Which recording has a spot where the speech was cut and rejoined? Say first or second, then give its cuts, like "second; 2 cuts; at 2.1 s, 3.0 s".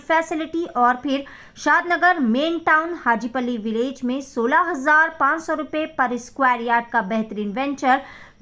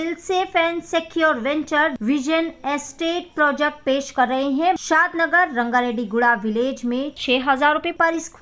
second; 2 cuts; at 2.0 s, 4.8 s